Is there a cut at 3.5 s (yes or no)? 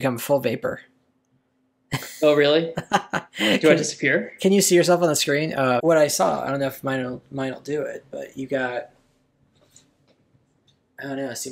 no